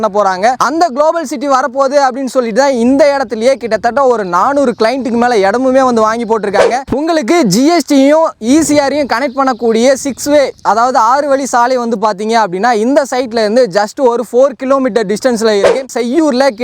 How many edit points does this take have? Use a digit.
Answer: 2